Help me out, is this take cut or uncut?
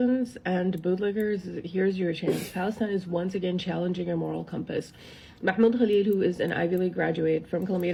uncut